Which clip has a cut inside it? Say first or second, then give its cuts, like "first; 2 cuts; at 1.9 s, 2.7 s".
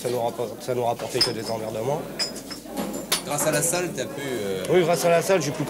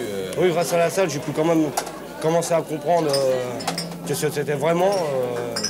first; 1 cut; at 2.6 s